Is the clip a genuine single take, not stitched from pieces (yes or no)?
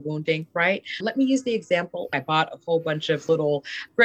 no